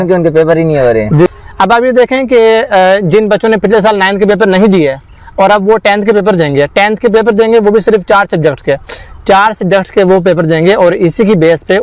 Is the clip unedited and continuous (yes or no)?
no